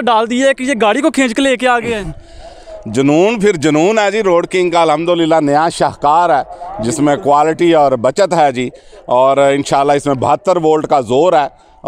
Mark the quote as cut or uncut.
uncut